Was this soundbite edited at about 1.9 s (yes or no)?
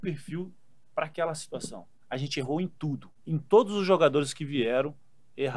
yes